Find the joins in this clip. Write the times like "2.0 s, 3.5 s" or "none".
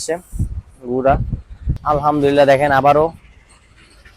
1.8 s